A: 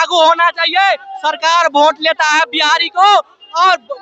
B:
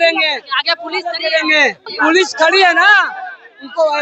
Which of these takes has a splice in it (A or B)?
B